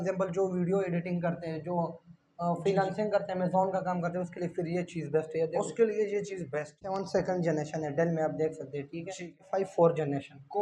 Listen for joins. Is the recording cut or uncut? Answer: cut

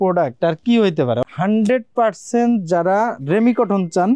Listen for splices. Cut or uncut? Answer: cut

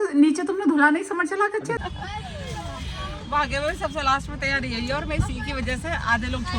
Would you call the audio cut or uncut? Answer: cut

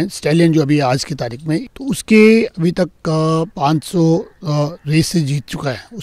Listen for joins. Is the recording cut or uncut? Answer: cut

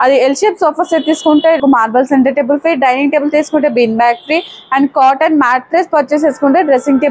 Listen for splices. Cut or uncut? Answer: cut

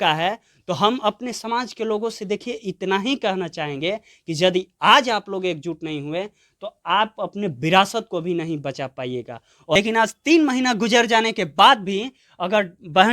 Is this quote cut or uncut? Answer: cut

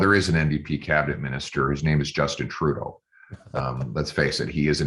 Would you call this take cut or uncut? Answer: uncut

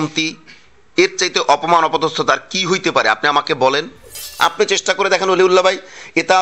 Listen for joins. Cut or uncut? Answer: cut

